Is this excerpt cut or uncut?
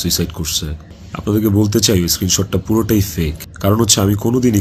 uncut